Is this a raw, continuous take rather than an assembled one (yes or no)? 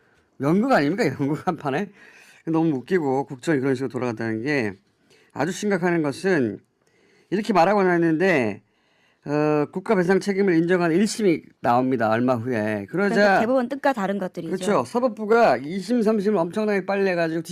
no